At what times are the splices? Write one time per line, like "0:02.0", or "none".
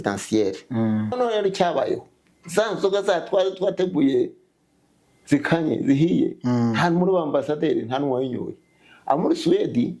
0:01.1